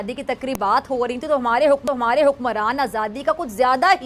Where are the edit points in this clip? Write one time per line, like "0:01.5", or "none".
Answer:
none